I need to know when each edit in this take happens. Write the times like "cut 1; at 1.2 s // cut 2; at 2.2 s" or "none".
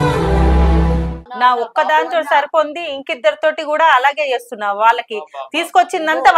cut 1; at 1.2 s

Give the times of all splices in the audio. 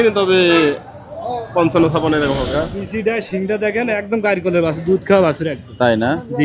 cut 1; at 2.5 s

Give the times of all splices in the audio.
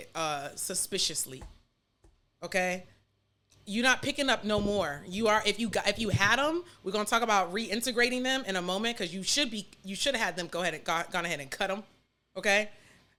none

